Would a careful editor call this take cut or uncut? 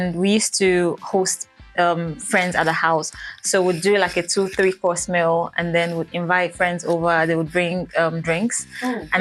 uncut